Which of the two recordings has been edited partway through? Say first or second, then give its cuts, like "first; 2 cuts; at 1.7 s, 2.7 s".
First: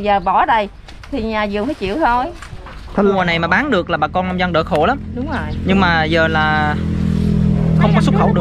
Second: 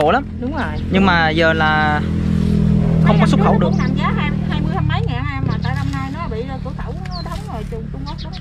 first; 1 cut; at 3.1 s